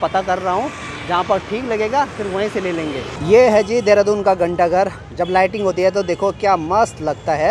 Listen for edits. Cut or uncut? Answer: uncut